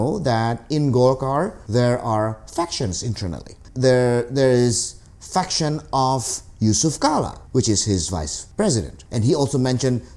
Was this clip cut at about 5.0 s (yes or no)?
no